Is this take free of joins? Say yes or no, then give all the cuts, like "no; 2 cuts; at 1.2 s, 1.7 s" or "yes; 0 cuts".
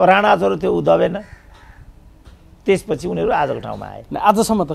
yes; 0 cuts